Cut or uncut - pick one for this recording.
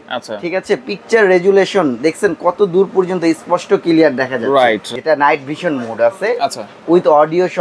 cut